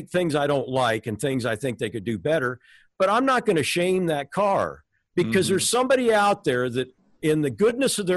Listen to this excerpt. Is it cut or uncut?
uncut